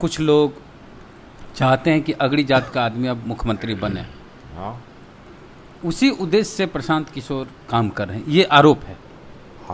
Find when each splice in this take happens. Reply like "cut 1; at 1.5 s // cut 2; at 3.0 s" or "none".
none